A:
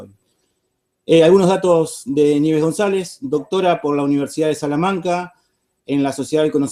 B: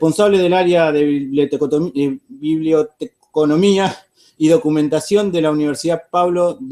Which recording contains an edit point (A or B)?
A